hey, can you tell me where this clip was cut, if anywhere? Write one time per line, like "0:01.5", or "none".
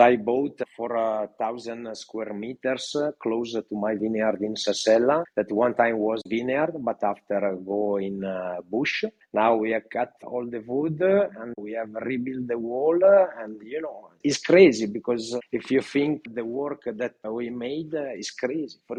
none